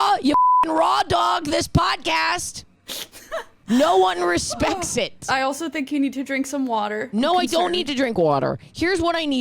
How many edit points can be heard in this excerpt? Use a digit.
2